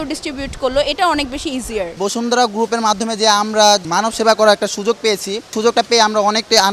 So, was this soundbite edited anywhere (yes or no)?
yes